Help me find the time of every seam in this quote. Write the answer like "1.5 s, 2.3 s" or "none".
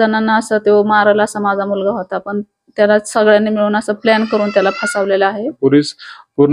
5.5 s

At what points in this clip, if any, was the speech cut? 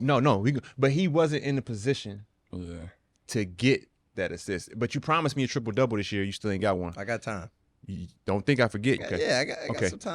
9.0 s

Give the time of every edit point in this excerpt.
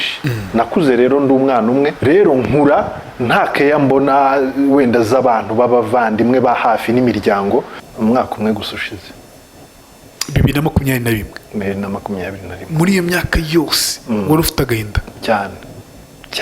7.7 s

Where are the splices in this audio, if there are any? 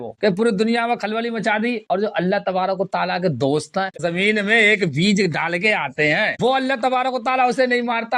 3.9 s, 6.3 s

